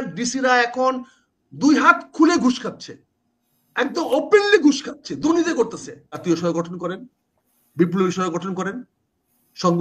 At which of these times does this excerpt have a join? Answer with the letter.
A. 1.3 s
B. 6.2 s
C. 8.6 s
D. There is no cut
B